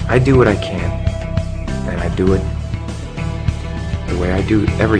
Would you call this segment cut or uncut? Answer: uncut